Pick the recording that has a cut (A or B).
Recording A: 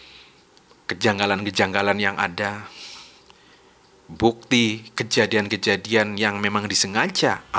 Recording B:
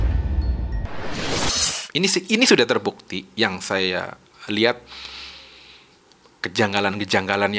B